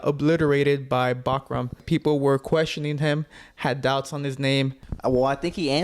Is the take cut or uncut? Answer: cut